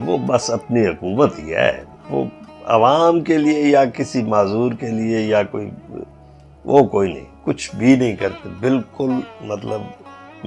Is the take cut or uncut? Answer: uncut